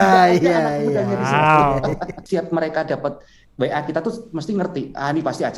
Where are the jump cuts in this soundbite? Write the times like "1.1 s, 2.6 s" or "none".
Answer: 2.2 s